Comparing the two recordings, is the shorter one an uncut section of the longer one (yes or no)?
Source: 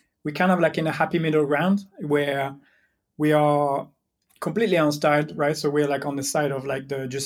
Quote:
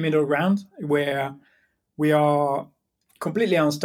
yes